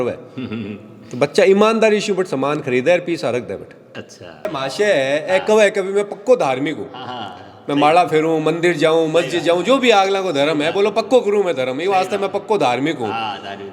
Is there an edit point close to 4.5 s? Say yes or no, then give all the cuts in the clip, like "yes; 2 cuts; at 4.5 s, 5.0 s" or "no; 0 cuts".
yes; 1 cut; at 4.5 s